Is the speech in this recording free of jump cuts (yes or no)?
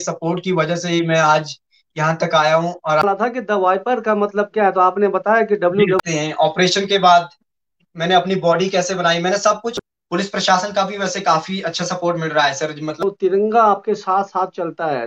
no